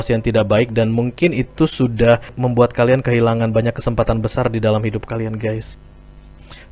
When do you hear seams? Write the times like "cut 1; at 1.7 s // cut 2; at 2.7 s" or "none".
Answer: cut 1; at 5.7 s